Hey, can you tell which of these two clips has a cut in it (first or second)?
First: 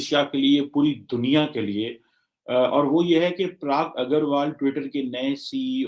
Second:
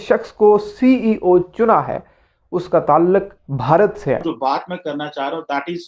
second